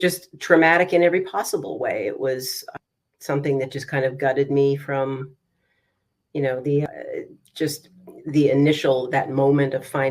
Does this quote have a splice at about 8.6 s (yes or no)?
no